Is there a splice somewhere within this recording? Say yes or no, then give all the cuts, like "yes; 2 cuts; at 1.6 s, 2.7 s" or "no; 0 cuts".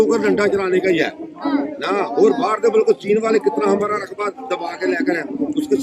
no; 0 cuts